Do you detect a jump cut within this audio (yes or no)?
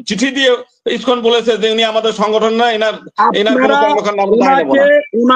no